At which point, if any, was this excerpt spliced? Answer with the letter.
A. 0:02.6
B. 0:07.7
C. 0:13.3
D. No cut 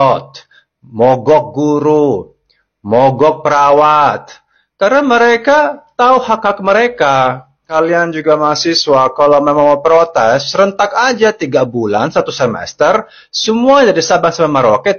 B